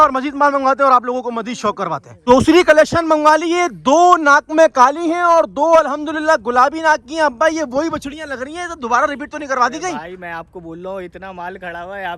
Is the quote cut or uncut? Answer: uncut